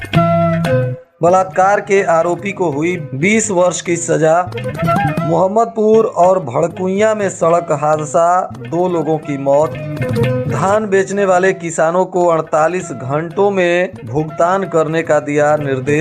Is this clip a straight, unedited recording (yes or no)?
no